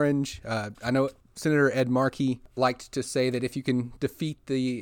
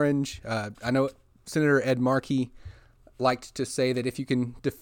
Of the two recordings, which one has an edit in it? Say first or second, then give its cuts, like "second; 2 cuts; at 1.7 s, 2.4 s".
first; 2 cuts; at 1.3 s, 2.5 s